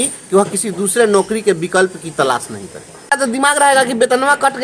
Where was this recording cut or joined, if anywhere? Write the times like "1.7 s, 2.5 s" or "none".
3.1 s